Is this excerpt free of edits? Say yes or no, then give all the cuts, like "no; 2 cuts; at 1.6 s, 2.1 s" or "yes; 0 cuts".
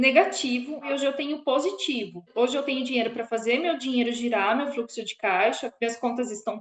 no; 2 cuts; at 0.8 s, 2.3 s